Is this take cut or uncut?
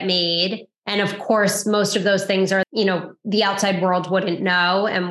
cut